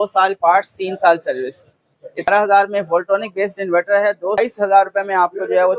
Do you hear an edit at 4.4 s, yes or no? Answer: yes